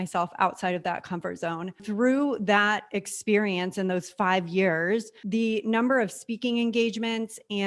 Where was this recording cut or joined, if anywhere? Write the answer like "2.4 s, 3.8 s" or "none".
1.8 s, 5.2 s